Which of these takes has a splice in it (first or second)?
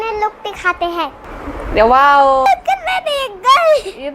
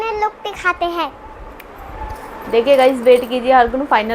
first